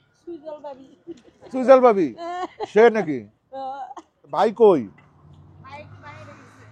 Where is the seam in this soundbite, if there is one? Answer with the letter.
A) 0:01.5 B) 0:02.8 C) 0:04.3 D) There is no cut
C